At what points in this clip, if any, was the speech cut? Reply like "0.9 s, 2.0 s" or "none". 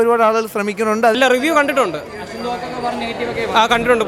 1.2 s

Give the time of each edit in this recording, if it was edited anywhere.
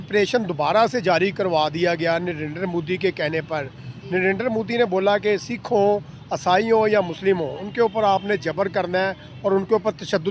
none

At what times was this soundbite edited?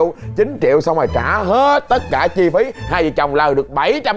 none

